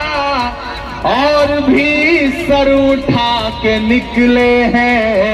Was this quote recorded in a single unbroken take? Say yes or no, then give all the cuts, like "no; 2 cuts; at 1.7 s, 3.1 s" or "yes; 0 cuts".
yes; 0 cuts